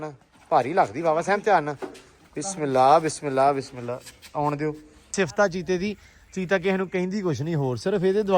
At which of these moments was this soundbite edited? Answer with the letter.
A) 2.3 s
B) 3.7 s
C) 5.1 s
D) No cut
C